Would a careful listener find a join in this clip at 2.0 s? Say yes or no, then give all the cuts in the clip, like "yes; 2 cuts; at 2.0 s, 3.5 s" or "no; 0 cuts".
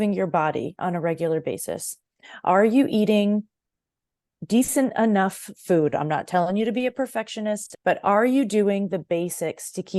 no; 1 cut; at 7.7 s